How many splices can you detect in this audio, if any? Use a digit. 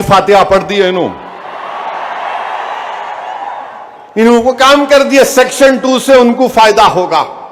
0